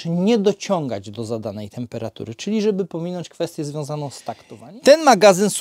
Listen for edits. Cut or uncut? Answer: cut